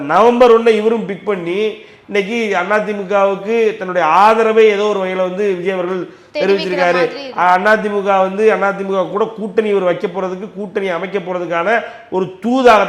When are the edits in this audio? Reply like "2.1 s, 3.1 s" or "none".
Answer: none